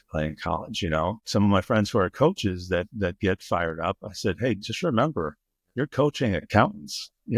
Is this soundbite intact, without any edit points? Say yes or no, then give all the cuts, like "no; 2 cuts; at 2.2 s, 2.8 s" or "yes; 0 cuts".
no; 1 cut; at 1.2 s